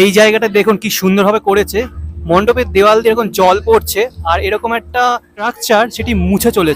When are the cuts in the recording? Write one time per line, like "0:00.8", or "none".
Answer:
0:05.6